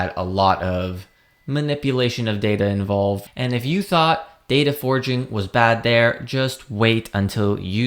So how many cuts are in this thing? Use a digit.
1